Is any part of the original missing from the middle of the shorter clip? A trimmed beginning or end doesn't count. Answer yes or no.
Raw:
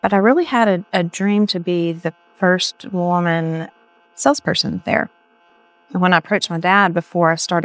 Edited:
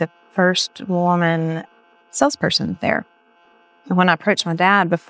no